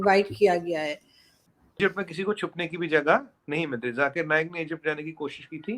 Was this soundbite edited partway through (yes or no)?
yes